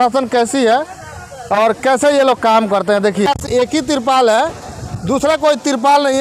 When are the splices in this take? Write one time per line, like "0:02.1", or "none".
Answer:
0:03.3